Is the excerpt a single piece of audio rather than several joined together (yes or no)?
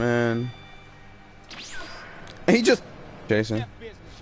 no